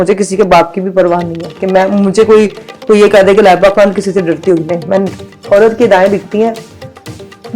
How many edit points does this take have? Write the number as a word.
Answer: one